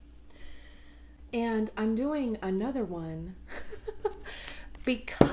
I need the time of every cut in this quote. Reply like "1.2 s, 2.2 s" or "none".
1.2 s